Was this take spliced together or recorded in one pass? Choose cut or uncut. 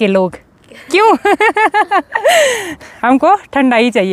uncut